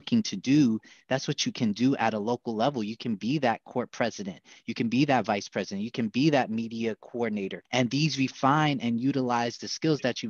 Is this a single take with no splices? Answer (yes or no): no